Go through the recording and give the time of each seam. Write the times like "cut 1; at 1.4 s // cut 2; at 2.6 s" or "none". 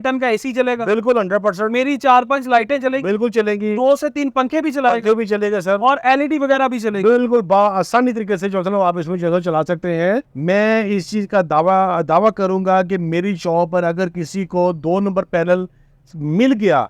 cut 1; at 10.3 s

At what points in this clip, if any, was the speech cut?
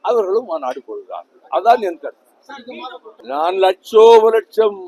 none

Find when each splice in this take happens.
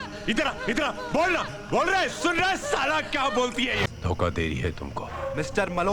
cut 1; at 3.9 s

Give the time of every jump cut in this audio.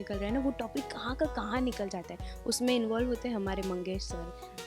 none

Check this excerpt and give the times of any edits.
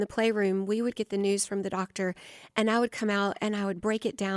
cut 1; at 0.9 s

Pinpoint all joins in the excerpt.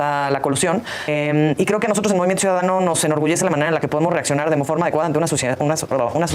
cut 1; at 1.0 s

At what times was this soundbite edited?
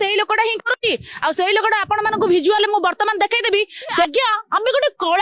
cut 1; at 4.1 s

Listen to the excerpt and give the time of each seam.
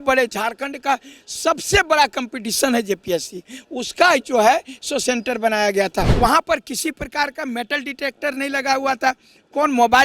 cut 1; at 6.1 s

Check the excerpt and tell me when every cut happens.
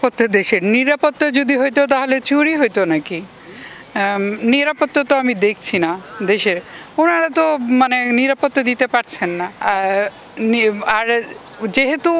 cut 1; at 9.5 s

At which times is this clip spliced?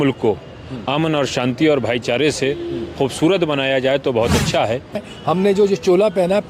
cut 1; at 5.1 s

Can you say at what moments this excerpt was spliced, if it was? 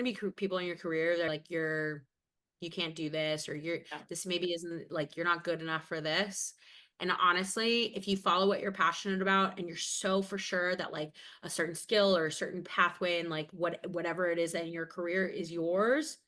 cut 1; at 1.3 s

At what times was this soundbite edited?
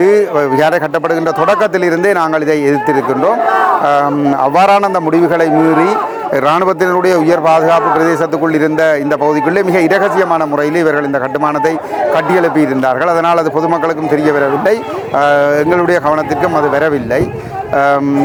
none

